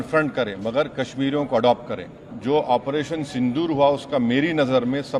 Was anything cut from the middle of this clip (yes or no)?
yes